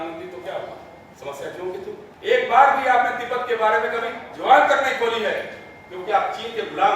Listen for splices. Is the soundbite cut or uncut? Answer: cut